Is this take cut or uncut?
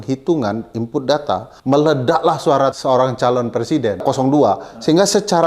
cut